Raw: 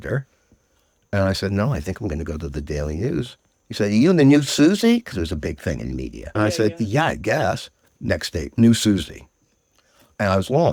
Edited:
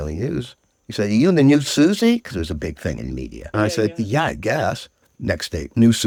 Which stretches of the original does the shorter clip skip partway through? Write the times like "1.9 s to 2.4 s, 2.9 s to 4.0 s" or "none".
none